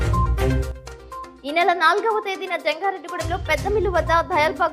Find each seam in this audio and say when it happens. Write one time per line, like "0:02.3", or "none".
0:01.3